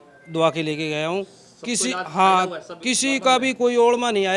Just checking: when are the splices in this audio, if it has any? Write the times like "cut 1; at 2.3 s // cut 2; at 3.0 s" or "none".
none